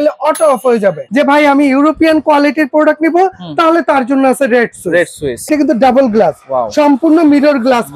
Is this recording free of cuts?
no; 2 cuts; at 1.0 s, 5.5 s

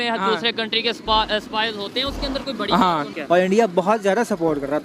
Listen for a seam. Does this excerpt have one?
yes; 1 cut; at 3.1 s

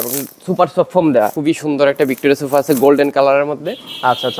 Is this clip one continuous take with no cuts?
no; 1 cut; at 1.4 s

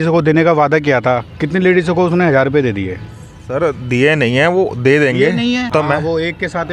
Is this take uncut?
no; 1 cut; at 5.7 s

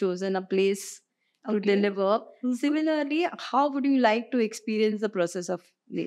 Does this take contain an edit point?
no; 0 cuts

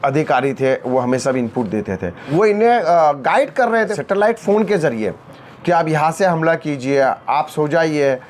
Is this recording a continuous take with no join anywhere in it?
no; 2 cuts; at 2.1 s, 4.0 s

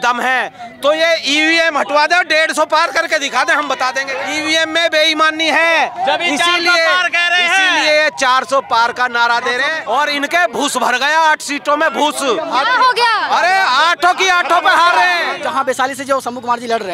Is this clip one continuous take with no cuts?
no; 3 cuts; at 4.1 s, 9.7 s, 15.3 s

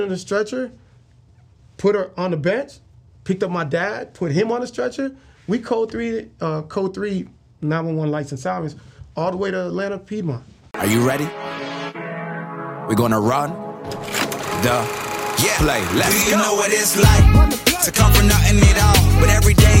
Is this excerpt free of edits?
no; 1 cut; at 10.6 s

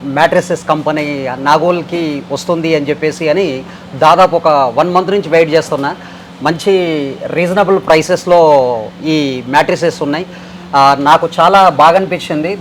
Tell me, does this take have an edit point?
no; 0 cuts

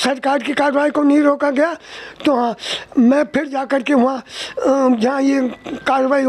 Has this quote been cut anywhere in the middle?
no; 0 cuts

